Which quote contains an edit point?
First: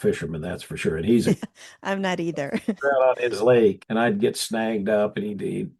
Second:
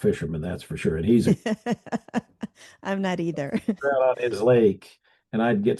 first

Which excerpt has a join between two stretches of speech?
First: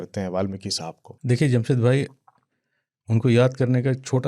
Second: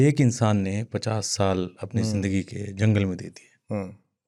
first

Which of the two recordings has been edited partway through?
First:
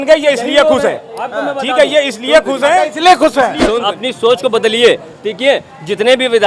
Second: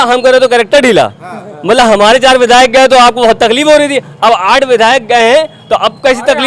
first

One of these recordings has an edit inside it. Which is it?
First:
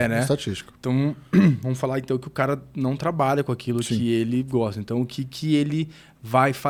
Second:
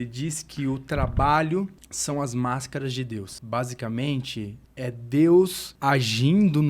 second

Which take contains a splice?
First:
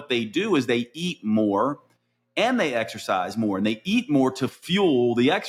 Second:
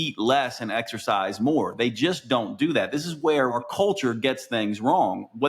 second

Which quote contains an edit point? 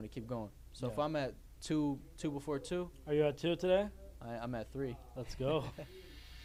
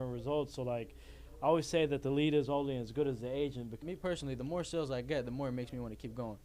second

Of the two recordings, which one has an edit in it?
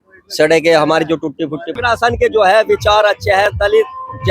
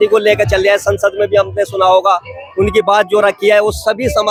first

